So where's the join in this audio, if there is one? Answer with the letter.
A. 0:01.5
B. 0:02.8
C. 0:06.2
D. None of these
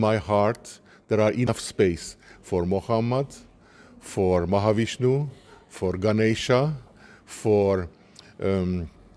A